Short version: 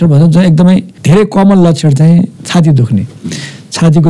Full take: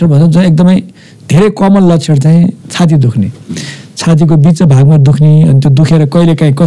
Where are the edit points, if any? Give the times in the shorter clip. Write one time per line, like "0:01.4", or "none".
0:00.9